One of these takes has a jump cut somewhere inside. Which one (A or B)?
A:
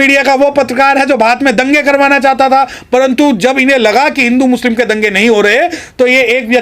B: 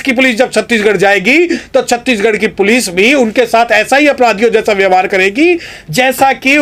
A